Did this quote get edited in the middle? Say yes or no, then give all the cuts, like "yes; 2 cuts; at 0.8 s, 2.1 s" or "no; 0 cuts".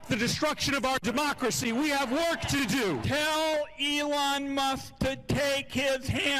no; 0 cuts